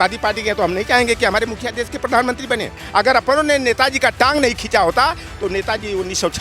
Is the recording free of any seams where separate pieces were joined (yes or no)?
no